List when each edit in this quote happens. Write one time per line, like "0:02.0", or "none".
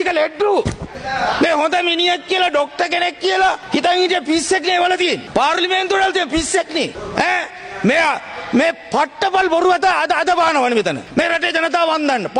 0:01.0